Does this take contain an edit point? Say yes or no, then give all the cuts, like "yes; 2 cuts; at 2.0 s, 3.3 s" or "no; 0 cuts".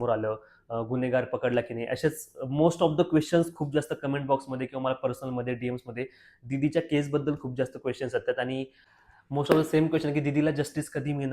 yes; 1 cut; at 8.7 s